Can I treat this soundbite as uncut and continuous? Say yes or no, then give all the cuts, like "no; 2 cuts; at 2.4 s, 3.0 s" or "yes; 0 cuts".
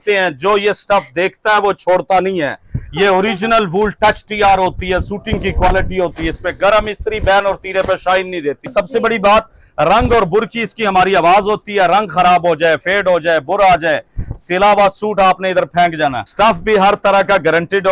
no; 2 cuts; at 8.7 s, 16.2 s